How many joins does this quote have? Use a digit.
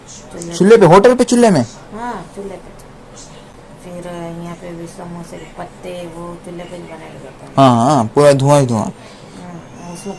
0